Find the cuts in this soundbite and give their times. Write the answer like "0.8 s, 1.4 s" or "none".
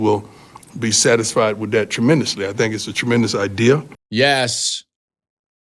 4.0 s